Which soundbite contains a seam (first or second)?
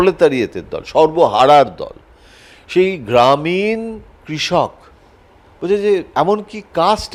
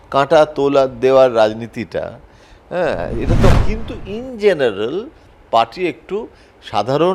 second